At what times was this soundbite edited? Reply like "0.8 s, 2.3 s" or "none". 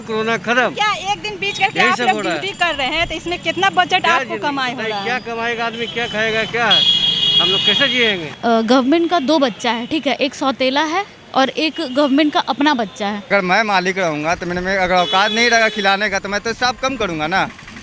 8.3 s, 13.2 s